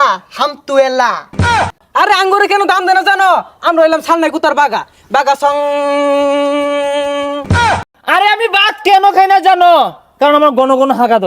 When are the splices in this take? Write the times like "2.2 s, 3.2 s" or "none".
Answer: 1.8 s, 7.7 s